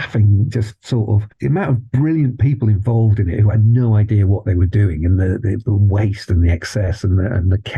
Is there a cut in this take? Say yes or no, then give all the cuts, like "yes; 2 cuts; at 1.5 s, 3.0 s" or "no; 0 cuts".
no; 0 cuts